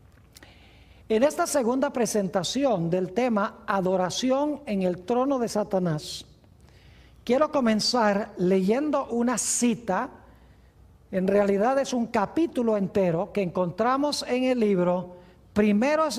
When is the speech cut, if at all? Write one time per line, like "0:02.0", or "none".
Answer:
none

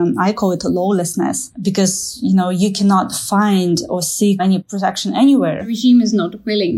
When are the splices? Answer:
0:01.5
0:04.6
0:05.8

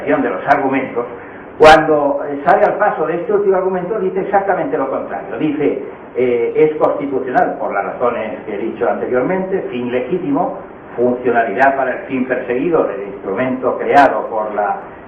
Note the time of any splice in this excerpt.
0:02.5

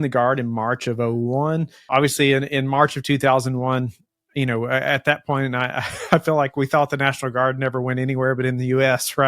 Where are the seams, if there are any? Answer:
0:01.8

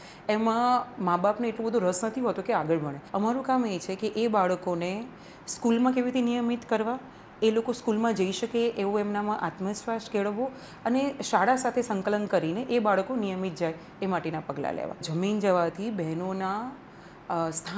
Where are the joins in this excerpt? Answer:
0:03.0
0:15.1

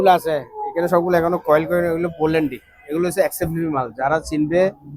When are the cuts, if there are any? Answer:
none

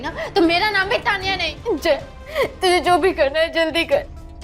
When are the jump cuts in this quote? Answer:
0:01.5

